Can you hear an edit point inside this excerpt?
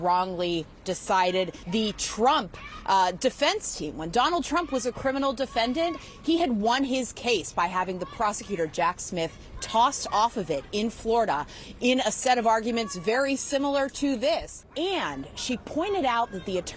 yes; 2 cuts; at 1.6 s, 14.6 s

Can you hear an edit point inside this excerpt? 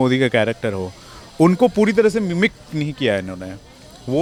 no; 0 cuts

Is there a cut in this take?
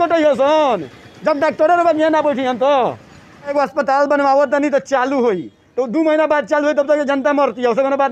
yes; 1 cut; at 3.5 s

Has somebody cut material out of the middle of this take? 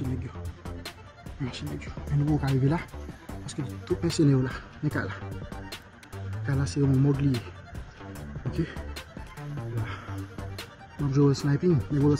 no; 0 cuts

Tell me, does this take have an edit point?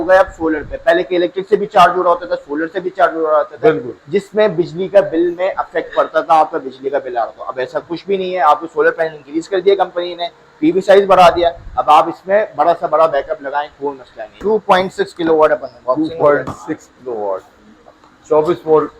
yes; 1 cut; at 14.3 s

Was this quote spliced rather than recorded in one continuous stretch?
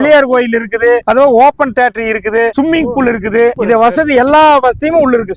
no; 0 cuts

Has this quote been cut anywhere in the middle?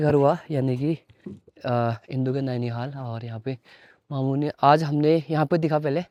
no; 0 cuts

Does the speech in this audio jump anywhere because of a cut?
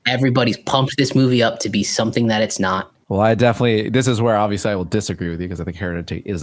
yes; 1 cut; at 3.0 s

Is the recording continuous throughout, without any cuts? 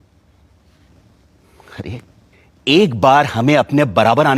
yes; 0 cuts

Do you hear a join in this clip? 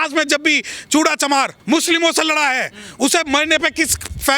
yes; 1 cut; at 1.6 s

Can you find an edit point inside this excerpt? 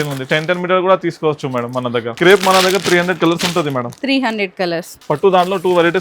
yes; 2 cuts; at 2.1 s, 4.9 s

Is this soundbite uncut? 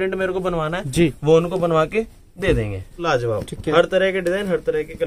no; 1 cut; at 3.0 s

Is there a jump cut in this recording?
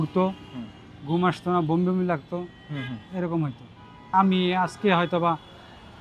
yes; 1 cut; at 4.1 s

